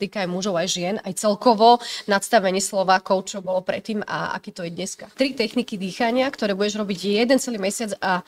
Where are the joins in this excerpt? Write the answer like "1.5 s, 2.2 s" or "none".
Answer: 5.1 s